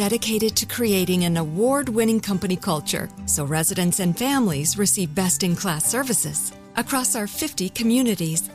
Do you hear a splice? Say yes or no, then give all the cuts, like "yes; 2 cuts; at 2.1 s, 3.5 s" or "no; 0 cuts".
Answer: no; 0 cuts